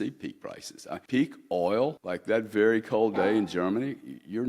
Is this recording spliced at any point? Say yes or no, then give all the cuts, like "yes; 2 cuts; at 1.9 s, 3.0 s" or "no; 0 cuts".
yes; 2 cuts; at 1.0 s, 2.0 s